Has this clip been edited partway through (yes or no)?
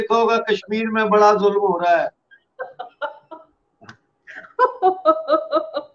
no